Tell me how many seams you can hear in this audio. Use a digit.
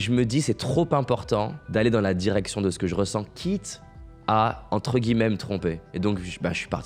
0